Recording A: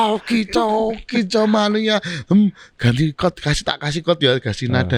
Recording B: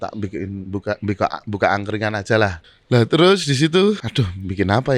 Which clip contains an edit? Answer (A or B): B